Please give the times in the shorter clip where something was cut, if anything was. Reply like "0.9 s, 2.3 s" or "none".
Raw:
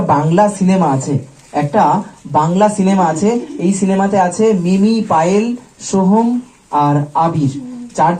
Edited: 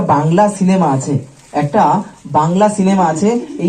none